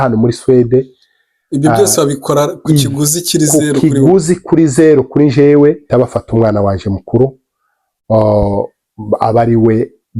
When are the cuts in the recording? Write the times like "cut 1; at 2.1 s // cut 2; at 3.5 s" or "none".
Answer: cut 1; at 5.9 s